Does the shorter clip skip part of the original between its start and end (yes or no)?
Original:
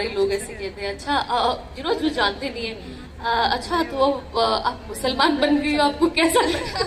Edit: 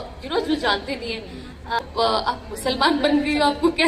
yes